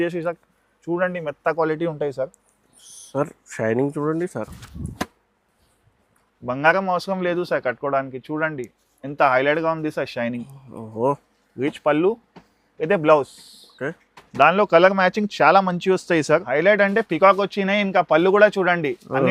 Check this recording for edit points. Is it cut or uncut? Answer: cut